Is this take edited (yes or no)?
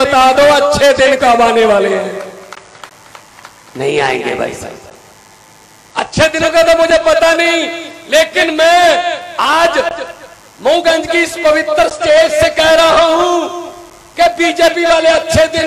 no